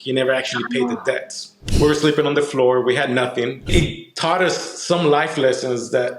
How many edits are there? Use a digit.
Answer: 2